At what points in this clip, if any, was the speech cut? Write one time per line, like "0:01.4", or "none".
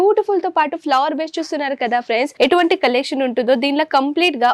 0:02.3